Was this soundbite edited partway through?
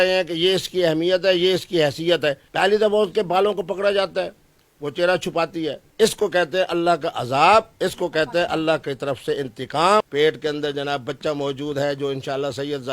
yes; 3 cuts; at 2.4 s, 5.8 s, 10.1 s

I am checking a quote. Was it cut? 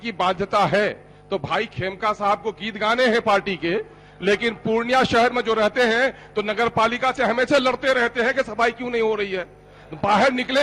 no; 0 cuts

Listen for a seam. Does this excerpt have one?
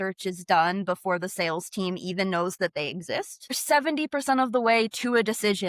yes; 1 cut; at 3.6 s

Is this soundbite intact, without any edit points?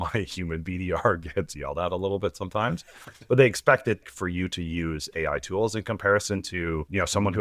yes; 0 cuts

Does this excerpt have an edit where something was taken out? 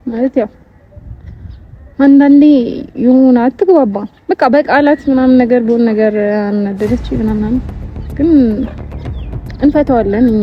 no; 0 cuts

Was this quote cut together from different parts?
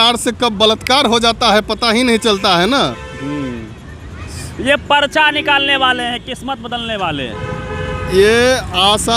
no; 0 cuts

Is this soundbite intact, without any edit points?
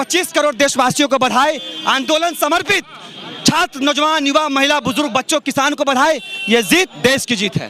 yes; 0 cuts

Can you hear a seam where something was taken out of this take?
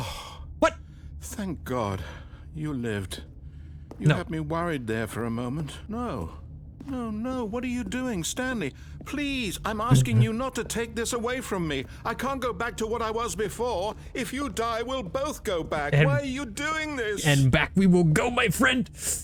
no; 0 cuts

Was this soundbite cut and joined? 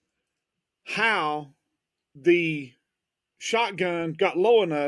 no; 0 cuts

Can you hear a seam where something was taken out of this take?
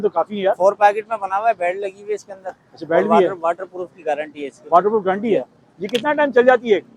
no; 0 cuts

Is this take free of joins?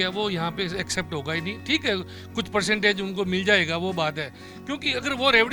yes; 0 cuts

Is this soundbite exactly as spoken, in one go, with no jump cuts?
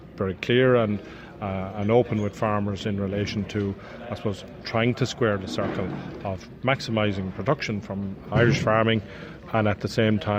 yes; 0 cuts

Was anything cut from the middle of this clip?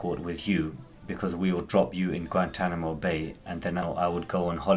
yes; 1 cut; at 3.8 s

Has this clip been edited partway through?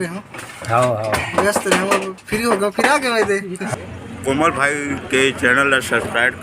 yes; 1 cut; at 3.6 s

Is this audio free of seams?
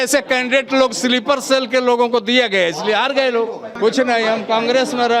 no; 1 cut; at 3.7 s

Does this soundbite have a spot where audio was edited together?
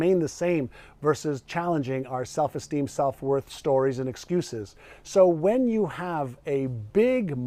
no; 0 cuts

